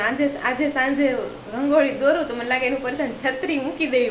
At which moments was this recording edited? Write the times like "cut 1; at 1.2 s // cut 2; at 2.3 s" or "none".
none